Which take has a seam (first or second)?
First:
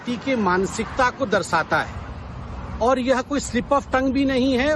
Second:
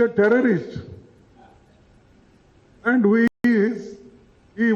second